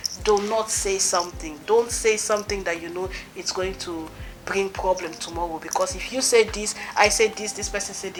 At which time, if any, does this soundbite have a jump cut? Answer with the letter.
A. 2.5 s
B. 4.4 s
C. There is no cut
C